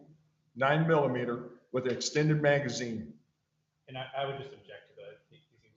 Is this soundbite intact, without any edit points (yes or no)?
yes